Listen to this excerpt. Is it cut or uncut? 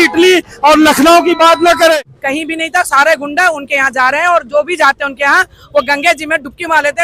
cut